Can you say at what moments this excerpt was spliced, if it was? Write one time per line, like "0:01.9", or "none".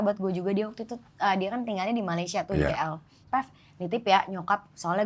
0:03.1